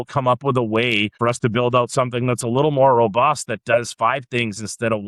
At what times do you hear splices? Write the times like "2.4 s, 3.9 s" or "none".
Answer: 1.2 s